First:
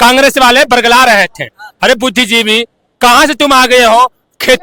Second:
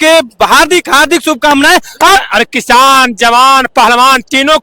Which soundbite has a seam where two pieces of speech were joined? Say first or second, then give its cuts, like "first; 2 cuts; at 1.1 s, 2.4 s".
second; 1 cut; at 2.2 s